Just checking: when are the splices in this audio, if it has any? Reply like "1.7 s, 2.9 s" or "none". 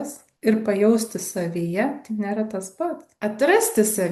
3.1 s